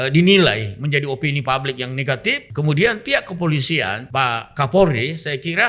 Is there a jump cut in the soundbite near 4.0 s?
yes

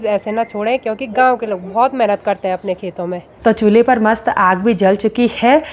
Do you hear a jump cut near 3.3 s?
yes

